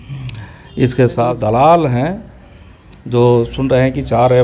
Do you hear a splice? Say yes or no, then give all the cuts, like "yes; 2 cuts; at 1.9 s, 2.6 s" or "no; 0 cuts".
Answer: yes; 1 cut; at 1.2 s